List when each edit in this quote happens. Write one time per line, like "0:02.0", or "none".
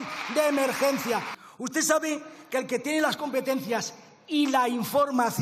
0:01.4